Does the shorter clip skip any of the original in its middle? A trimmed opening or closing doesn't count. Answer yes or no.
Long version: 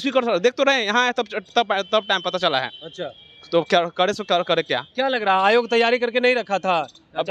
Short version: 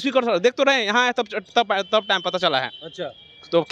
no